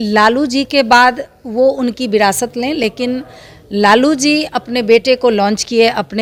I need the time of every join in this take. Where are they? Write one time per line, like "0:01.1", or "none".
none

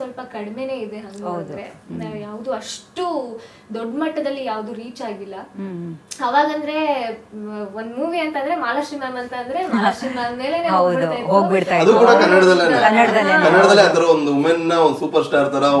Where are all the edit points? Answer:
none

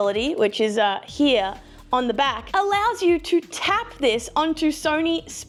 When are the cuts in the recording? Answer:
none

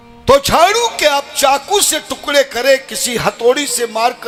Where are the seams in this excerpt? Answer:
none

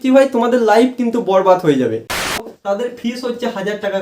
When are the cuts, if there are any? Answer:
0:02.3

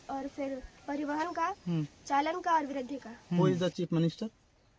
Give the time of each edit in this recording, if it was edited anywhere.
0:03.4

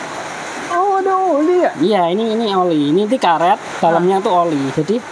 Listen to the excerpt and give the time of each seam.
none

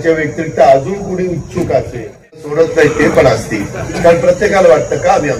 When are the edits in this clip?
0:02.5

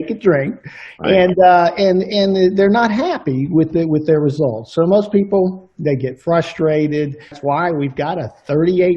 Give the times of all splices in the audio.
0:07.4

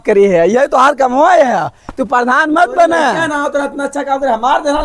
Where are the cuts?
0:03.2

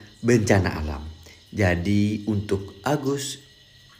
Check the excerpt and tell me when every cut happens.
none

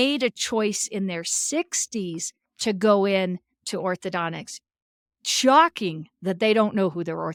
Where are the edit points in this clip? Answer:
none

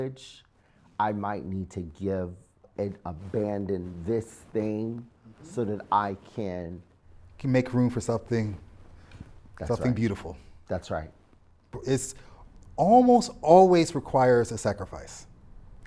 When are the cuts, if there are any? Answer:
0:02.6
0:11.8

